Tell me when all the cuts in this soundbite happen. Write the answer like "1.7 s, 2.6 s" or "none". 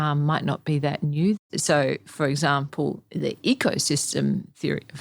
1.4 s